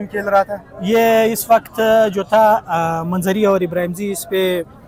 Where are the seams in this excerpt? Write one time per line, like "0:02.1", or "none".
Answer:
none